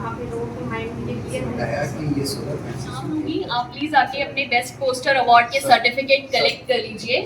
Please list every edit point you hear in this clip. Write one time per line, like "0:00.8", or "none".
0:03.1